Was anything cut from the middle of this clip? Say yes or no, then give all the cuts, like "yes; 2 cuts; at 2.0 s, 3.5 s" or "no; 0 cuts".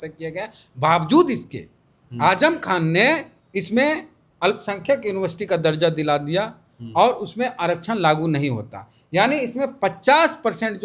yes; 1 cut; at 3.4 s